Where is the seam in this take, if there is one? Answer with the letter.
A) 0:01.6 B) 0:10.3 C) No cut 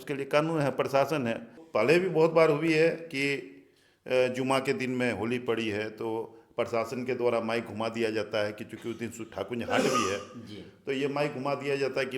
A